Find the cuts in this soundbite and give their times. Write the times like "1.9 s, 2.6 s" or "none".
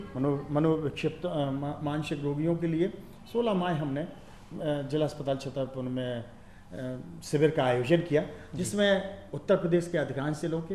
none